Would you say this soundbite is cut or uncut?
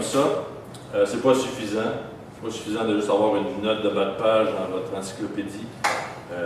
uncut